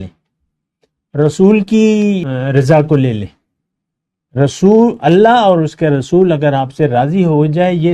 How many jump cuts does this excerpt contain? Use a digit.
1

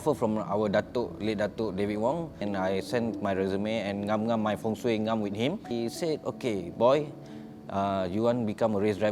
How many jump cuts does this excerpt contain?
2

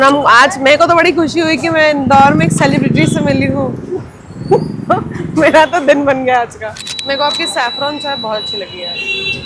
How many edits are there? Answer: 0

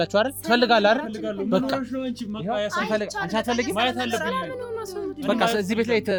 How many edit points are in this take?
0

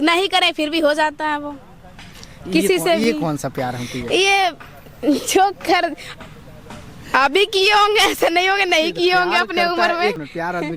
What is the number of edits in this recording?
0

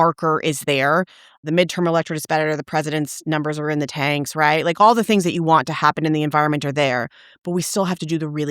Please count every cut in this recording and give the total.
1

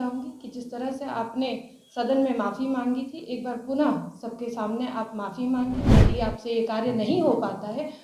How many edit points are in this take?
1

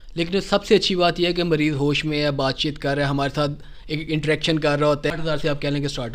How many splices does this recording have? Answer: 1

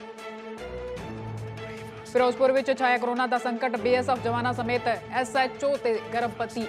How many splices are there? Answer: 0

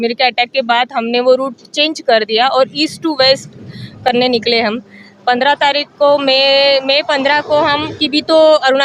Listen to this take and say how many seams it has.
0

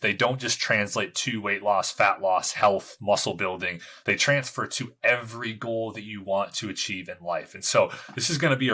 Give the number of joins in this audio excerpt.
0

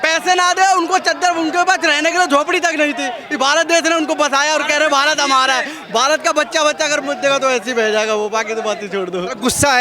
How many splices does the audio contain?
0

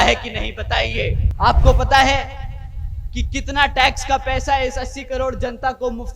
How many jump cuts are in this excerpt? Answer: 1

